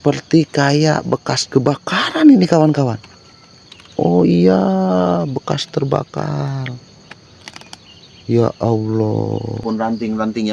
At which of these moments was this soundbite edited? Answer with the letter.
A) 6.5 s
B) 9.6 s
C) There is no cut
B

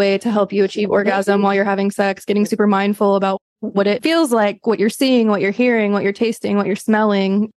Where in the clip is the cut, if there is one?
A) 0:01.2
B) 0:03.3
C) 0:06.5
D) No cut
B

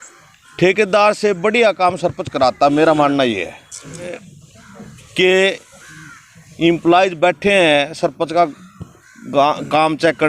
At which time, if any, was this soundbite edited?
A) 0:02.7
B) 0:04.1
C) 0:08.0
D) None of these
B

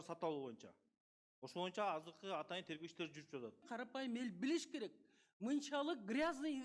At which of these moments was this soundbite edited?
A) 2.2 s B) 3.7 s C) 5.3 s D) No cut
B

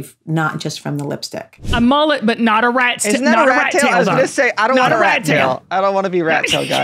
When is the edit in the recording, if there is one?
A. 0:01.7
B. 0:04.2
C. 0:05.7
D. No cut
A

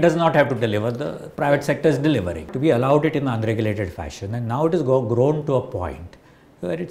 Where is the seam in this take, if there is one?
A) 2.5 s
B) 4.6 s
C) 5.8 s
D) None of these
A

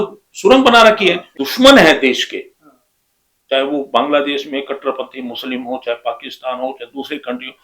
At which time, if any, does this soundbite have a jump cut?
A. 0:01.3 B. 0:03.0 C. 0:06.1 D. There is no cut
A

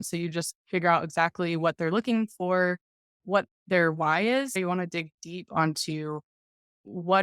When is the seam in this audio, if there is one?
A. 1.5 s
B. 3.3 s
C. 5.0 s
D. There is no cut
D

